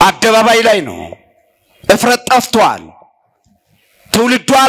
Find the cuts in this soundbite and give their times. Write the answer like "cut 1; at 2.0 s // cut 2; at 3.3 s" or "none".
none